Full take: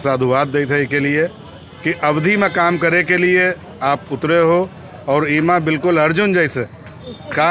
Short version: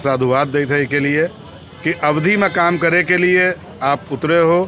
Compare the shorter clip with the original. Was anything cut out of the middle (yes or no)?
no